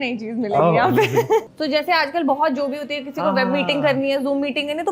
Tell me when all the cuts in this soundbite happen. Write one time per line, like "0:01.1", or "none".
0:01.5